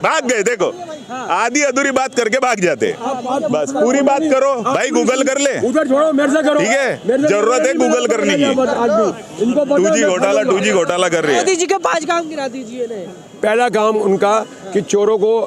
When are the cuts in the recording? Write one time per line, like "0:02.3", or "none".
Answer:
0:11.4